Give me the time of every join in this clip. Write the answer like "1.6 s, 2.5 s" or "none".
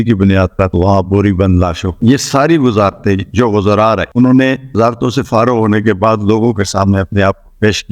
1.9 s